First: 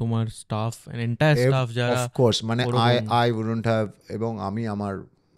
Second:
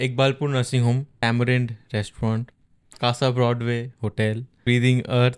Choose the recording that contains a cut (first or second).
second